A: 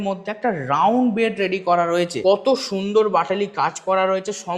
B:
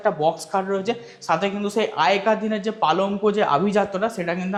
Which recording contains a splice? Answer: A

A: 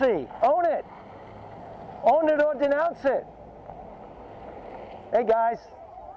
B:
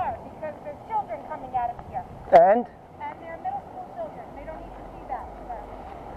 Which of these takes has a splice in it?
A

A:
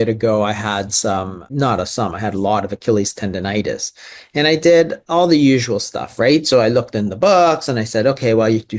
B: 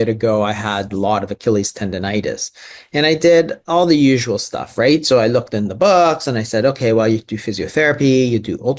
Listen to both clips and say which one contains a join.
B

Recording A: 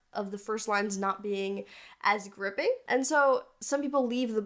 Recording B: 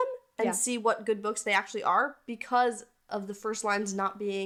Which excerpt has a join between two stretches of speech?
A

